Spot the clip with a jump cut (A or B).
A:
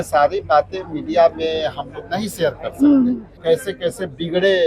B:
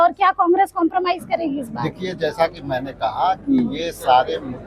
A